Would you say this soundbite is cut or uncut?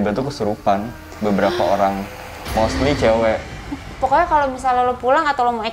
cut